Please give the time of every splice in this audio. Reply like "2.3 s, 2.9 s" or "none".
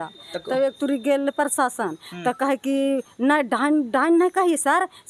none

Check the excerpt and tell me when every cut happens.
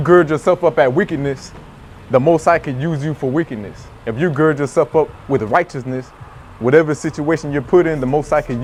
none

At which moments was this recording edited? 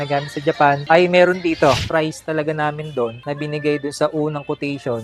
1.8 s

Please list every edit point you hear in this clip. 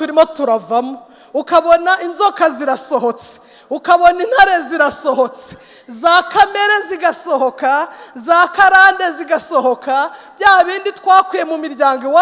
none

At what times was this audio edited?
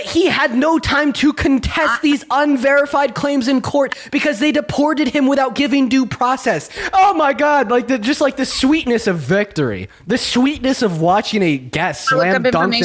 6.8 s

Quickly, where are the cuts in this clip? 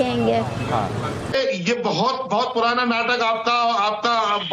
1.3 s

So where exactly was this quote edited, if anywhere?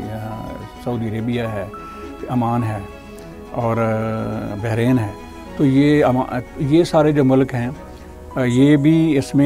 none

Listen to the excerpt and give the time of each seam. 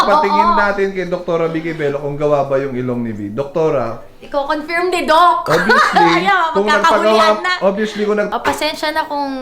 8.3 s

